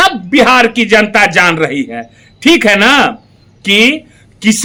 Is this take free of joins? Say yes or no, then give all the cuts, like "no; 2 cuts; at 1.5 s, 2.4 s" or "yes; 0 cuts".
yes; 0 cuts